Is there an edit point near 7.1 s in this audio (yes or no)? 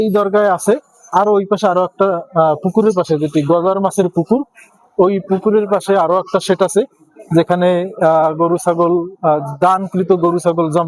no